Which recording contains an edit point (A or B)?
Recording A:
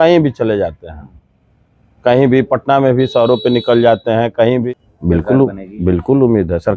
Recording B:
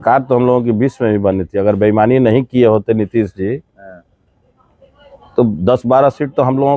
A